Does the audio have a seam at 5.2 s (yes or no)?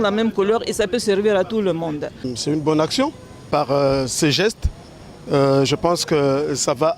no